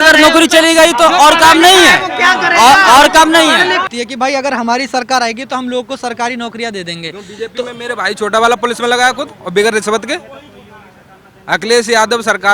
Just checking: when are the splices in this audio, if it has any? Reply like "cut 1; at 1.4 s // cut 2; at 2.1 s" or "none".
cut 1; at 3.9 s